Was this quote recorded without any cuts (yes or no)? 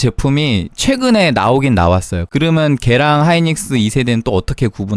no